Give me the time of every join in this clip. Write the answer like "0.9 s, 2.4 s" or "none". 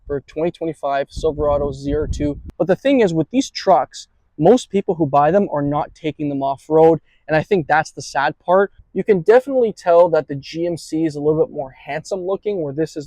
2.5 s, 8.8 s